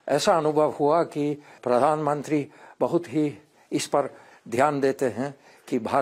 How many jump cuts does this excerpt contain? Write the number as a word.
two